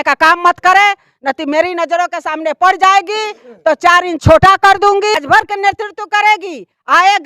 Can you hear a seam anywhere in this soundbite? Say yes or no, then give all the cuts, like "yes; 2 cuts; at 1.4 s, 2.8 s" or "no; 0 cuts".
yes; 1 cut; at 5.2 s